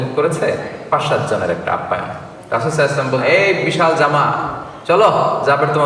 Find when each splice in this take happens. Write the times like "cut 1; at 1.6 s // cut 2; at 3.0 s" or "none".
cut 1; at 3.2 s

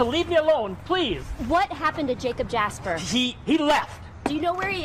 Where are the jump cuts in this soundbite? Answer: none

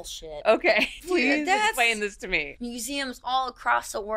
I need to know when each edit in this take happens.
cut 1; at 0.9 s // cut 2; at 2.5 s

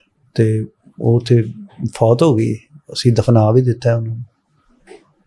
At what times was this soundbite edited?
none

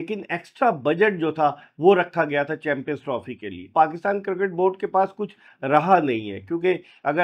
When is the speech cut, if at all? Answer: cut 1; at 3.6 s

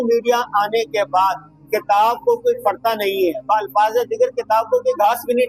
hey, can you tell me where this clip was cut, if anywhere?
none

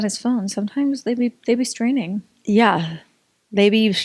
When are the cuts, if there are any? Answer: none

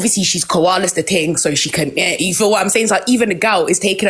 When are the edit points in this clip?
none

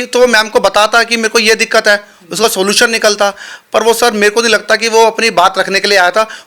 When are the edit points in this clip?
none

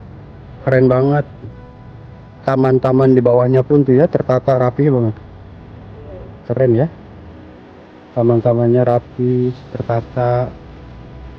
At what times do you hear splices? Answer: none

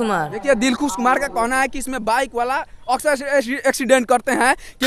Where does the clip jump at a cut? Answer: none

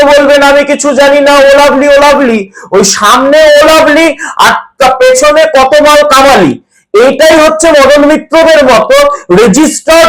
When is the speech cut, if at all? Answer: none

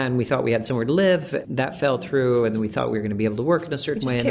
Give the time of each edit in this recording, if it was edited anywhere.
cut 1; at 1.4 s

